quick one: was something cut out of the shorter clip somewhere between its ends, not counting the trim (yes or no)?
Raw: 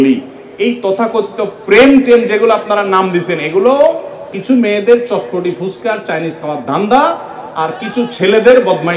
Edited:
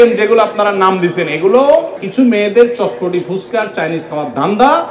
yes